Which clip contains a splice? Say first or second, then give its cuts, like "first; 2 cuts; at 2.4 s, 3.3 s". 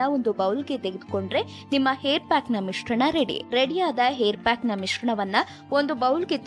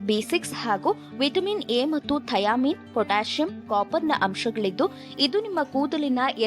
first; 1 cut; at 3.4 s